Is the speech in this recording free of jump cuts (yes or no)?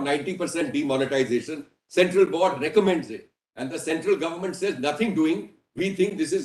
yes